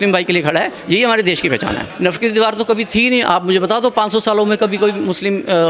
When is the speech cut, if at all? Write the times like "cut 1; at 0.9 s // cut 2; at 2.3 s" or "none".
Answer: cut 1; at 1.9 s